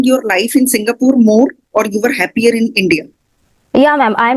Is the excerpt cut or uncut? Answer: uncut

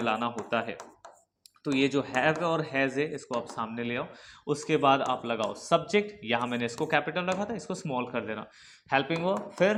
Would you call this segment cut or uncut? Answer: uncut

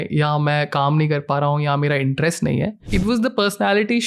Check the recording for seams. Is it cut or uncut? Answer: cut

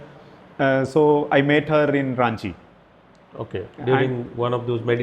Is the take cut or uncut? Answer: uncut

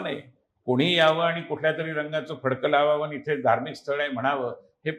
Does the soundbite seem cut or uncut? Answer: uncut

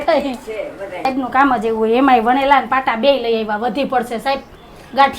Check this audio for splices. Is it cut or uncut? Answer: cut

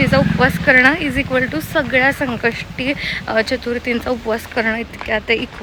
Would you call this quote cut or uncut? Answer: uncut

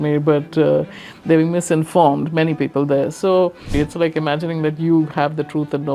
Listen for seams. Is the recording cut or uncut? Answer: cut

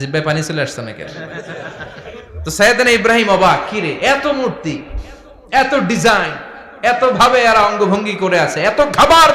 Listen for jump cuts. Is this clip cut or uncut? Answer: uncut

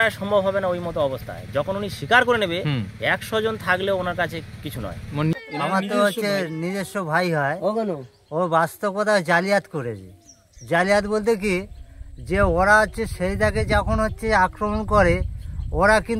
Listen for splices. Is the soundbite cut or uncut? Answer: cut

